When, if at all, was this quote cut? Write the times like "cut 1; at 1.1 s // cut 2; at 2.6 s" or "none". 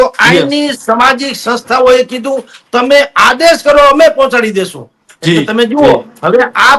none